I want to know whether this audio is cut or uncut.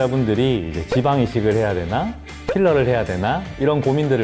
uncut